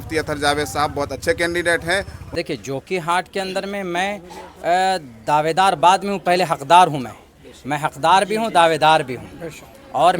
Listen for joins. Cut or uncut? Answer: cut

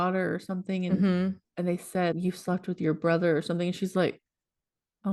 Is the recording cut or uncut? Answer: cut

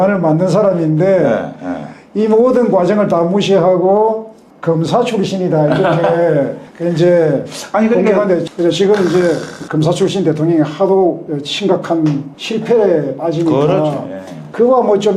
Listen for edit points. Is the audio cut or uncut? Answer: uncut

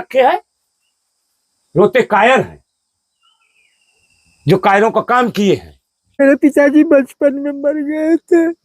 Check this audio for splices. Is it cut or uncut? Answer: cut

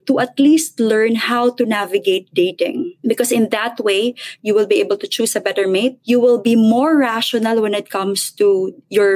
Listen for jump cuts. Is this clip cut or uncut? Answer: cut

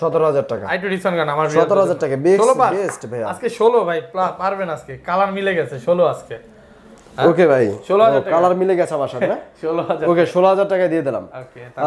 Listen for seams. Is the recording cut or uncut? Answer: uncut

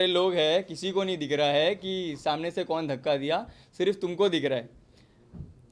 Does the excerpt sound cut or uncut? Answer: uncut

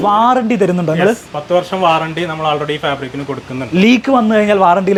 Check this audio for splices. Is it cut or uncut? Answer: uncut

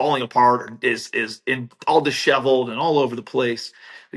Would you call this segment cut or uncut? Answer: uncut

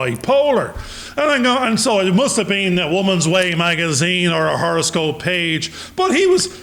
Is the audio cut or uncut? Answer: uncut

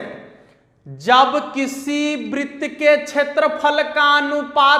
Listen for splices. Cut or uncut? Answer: uncut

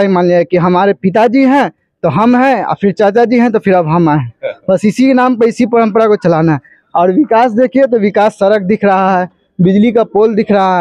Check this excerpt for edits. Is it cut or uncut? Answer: uncut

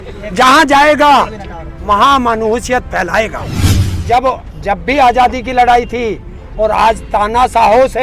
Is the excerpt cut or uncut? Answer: cut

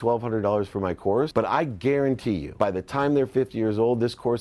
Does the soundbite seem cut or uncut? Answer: cut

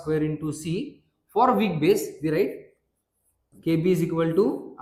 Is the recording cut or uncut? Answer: uncut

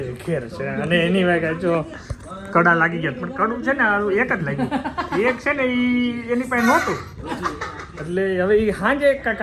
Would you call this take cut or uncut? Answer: uncut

